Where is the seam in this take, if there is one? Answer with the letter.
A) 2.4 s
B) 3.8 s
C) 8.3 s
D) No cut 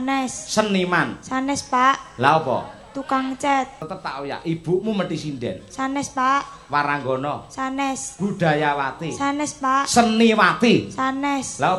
B